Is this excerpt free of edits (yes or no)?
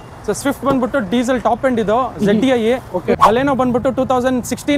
no